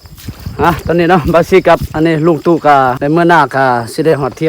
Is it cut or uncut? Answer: cut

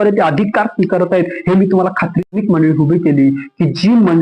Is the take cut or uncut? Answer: cut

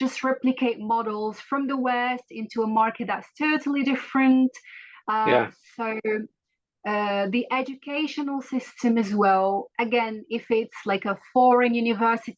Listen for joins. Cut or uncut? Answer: uncut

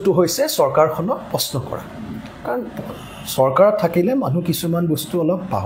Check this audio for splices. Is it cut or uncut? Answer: uncut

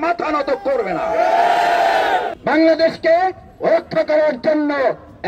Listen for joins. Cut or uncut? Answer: cut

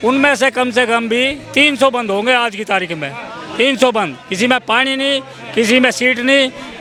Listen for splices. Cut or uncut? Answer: uncut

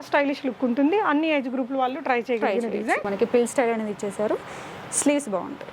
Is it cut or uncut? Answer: cut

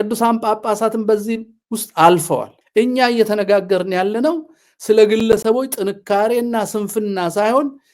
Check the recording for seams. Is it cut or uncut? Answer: cut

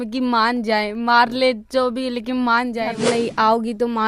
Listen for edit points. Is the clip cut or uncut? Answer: cut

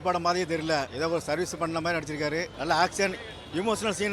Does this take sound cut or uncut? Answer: cut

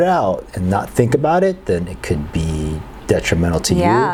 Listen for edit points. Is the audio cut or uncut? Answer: uncut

